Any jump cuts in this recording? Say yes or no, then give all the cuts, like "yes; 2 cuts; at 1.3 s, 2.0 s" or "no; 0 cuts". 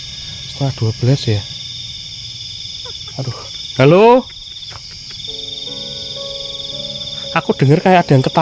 no; 0 cuts